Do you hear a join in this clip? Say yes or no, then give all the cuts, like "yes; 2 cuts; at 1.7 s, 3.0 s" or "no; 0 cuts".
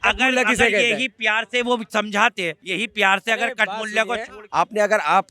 yes; 2 cuts; at 2.6 s, 4.4 s